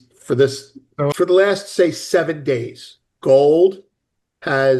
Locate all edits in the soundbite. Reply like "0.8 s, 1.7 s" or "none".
1.1 s